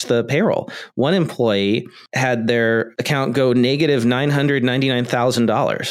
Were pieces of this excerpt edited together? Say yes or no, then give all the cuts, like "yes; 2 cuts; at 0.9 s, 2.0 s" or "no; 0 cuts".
no; 0 cuts